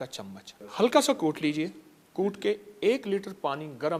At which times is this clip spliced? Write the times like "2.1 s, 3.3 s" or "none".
none